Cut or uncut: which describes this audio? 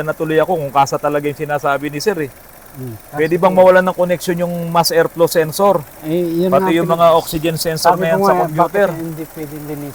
uncut